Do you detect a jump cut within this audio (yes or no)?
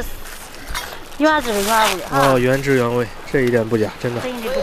no